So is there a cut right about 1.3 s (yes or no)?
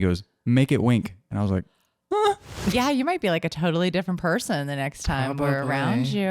no